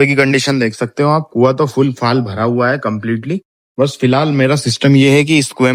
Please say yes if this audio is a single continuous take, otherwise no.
yes